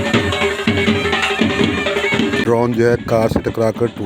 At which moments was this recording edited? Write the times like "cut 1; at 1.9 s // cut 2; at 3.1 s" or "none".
cut 1; at 2.4 s